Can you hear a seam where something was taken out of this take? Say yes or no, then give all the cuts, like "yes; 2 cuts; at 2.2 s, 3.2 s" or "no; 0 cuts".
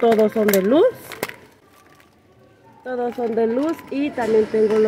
no; 0 cuts